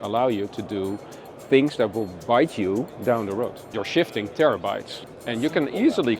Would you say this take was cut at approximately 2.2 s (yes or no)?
no